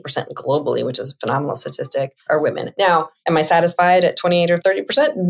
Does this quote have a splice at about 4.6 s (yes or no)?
yes